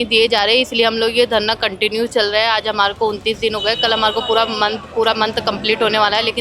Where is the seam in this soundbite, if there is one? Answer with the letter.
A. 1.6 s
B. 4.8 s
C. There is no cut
C